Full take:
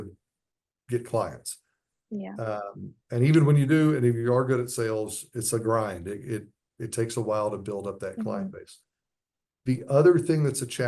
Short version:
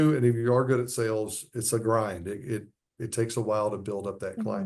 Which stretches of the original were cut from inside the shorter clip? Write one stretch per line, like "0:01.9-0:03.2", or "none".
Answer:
none

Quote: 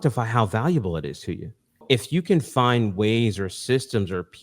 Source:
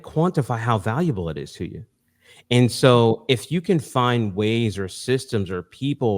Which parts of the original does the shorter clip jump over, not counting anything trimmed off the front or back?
0:02.1-0:03.2

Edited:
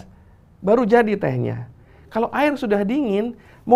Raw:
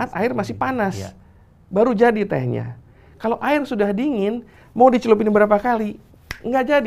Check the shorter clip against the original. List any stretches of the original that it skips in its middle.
none

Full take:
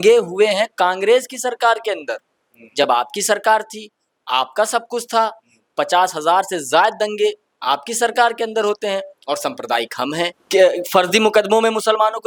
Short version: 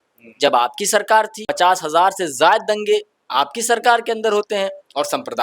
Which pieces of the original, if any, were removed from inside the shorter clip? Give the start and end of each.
0:03.8-0:05.7

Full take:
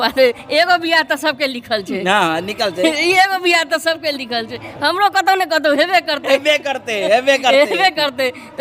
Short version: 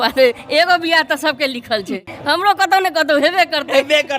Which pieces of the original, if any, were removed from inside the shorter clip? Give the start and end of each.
0:02.0-0:04.5

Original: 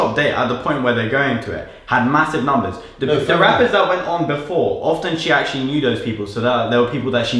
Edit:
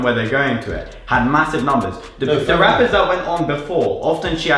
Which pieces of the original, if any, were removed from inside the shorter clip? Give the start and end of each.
none

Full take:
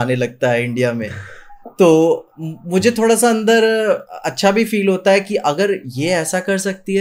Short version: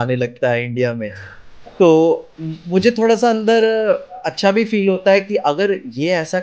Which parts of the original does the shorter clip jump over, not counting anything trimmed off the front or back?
none

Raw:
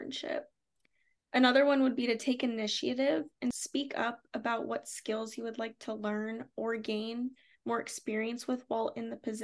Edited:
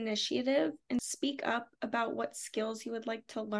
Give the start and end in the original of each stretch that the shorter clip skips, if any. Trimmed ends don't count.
none

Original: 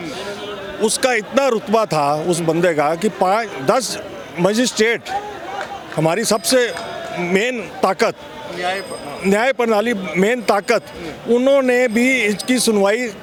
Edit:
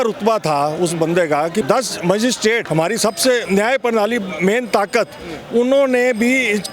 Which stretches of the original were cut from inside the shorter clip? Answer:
0:03.1-0:04.0
0:05.0-0:05.9
0:06.7-0:09.2

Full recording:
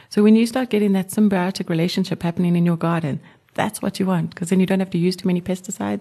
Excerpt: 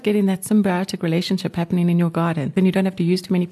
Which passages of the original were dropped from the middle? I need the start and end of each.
0:03.2-0:04.5

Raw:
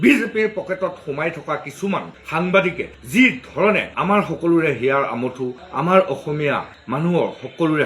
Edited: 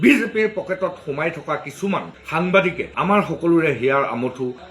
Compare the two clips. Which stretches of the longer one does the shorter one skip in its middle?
0:02.9-0:03.9

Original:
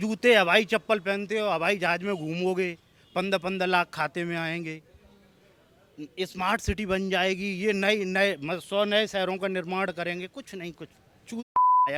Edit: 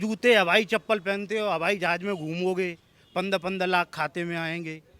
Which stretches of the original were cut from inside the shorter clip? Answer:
none

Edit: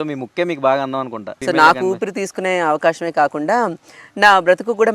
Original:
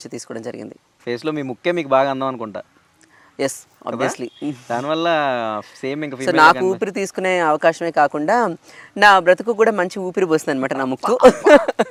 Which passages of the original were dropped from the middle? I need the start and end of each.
0:02.6-0:06.1

